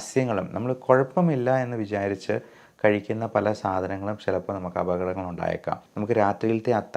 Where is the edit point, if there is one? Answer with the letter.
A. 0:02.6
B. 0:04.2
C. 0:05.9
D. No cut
C